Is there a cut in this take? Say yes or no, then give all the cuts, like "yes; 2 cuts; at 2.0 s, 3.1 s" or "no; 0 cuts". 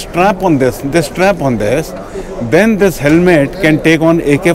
no; 0 cuts